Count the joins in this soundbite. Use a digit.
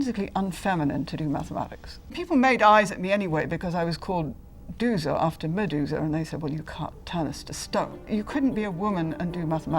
2